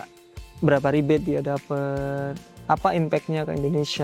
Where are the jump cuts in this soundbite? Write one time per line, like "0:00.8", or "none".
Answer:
0:02.4